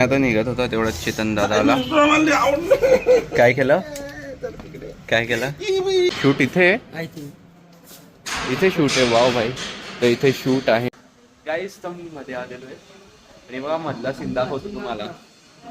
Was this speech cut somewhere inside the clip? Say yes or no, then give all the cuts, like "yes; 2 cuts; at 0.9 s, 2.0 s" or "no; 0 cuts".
yes; 2 cuts; at 6.1 s, 10.9 s